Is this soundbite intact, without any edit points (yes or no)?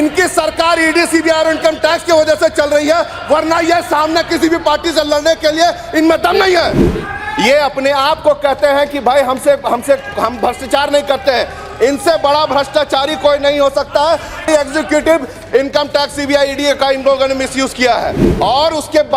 no